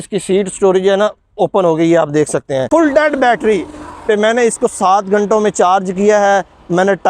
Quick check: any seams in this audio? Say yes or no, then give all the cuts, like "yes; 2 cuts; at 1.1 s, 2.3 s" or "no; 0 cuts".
yes; 1 cut; at 2.7 s